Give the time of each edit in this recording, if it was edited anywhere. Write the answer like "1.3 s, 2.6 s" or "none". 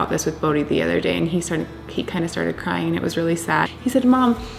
none